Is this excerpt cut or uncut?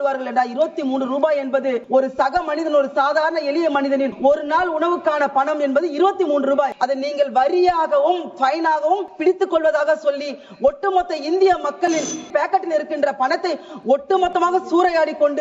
cut